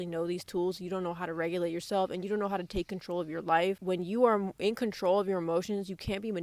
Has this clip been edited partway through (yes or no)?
no